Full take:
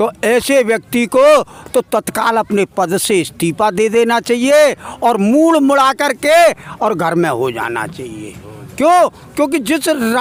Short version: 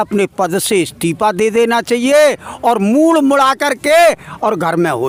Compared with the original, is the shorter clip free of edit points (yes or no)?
yes